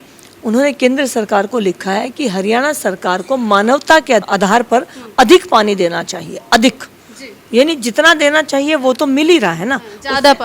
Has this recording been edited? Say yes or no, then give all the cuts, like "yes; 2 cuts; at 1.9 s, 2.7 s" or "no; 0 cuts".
yes; 1 cut; at 4.2 s